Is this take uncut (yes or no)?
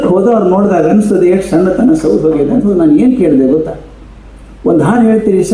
no